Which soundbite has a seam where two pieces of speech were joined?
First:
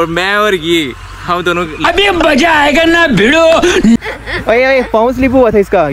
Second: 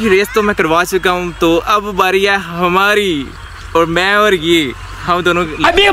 first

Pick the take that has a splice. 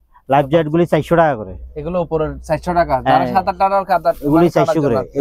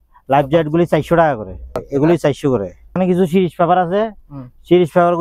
second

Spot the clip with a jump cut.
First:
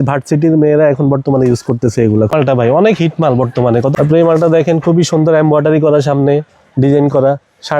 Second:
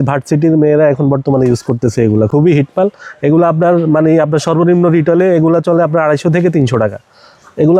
first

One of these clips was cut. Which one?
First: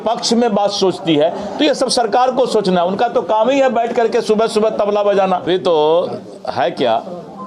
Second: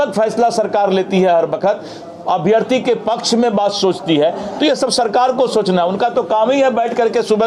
first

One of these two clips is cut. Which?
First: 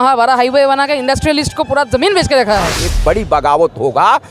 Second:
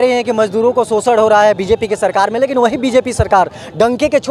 first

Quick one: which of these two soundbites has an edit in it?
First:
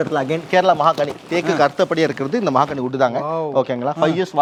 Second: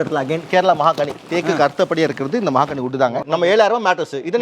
second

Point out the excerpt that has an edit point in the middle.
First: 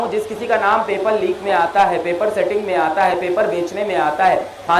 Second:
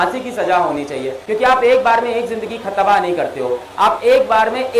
second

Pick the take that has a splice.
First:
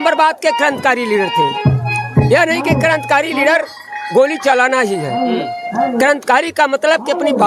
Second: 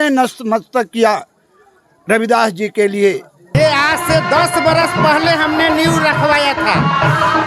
second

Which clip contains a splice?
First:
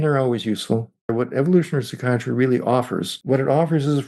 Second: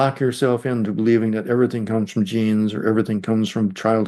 first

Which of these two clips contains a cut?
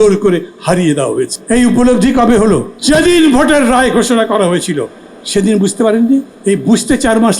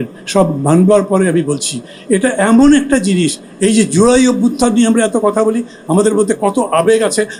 first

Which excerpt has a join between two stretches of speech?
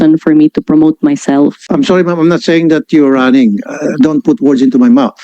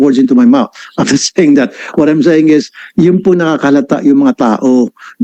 first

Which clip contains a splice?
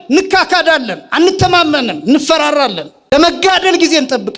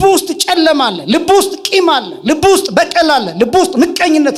first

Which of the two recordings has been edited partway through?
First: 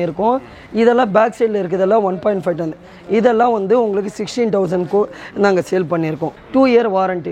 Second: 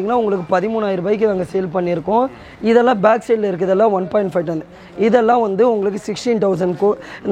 first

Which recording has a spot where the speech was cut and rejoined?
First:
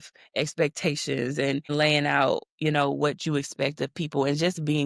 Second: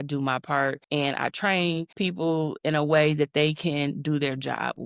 second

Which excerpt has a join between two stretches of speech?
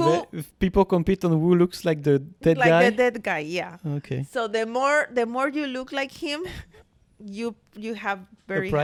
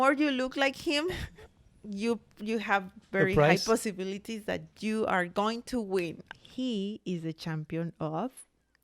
second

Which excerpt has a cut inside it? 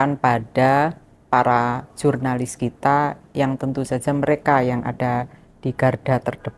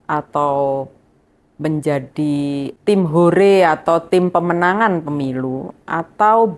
second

